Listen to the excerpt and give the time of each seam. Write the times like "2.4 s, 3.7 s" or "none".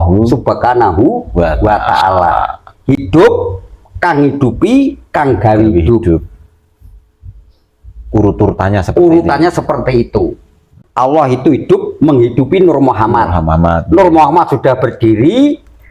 10.8 s